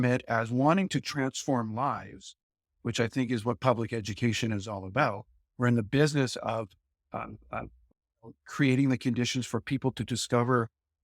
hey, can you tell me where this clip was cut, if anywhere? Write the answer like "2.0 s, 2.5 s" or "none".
none

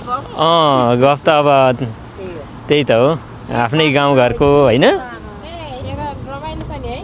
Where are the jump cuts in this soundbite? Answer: 5.7 s

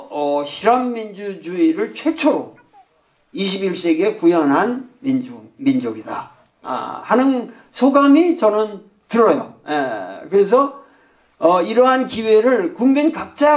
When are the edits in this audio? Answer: none

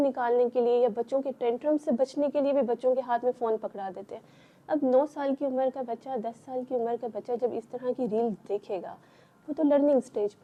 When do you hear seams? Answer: none

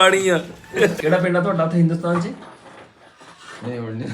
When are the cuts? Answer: 0.9 s

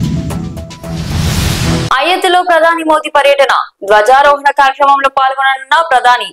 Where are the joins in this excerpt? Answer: 1.8 s

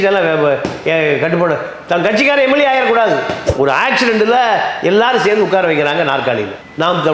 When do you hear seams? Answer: 3.4 s

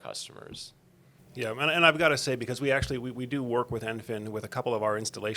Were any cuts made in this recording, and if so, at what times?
1.1 s

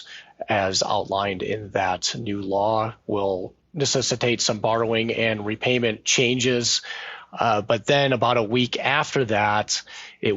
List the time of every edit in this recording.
3.6 s

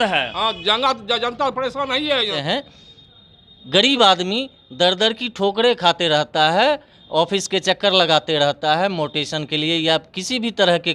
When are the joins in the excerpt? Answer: 2.4 s

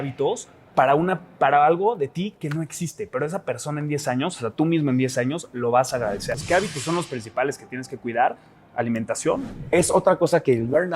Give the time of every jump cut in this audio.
6.3 s, 9.6 s

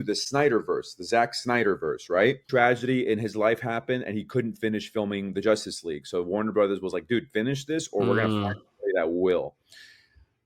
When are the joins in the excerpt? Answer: 2.4 s

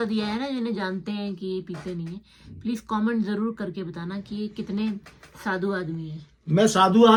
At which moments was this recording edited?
none

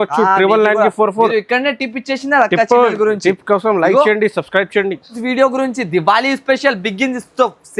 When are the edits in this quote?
5.2 s

